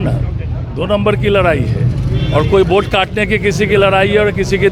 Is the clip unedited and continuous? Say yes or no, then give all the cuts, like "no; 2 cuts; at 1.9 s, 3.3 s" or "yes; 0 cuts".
yes; 0 cuts